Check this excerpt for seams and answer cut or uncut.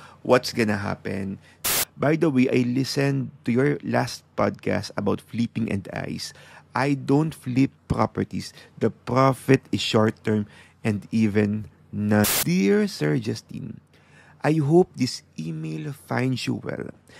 cut